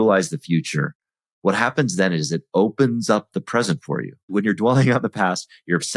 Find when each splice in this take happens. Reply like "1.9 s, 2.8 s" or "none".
4.3 s